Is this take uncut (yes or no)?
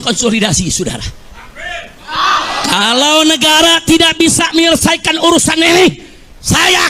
yes